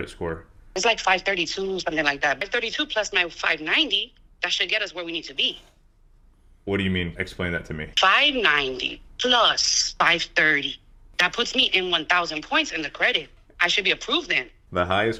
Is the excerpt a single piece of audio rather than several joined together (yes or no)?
yes